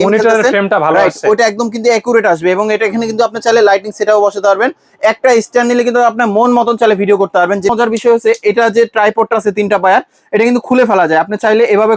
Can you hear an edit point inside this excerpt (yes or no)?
yes